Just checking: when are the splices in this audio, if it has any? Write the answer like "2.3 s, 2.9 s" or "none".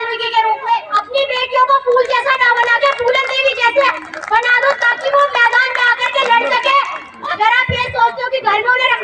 0.9 s, 7.1 s